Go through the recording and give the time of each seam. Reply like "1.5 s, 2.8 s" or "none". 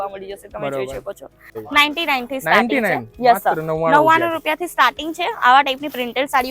1.6 s